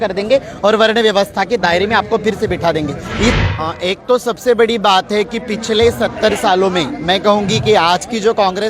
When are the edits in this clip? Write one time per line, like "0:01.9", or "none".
0:03.4